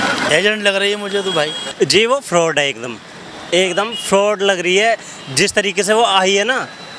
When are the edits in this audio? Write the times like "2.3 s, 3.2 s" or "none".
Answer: 1.6 s